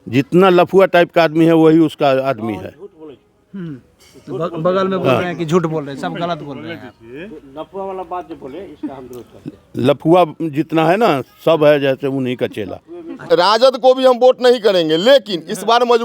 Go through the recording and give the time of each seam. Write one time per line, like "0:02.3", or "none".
0:13.2